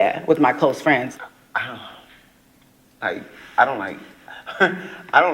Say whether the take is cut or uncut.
cut